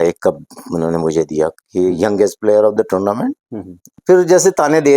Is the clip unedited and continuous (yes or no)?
no